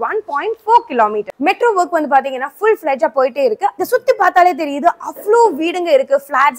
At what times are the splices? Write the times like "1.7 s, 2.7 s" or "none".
1.3 s, 3.8 s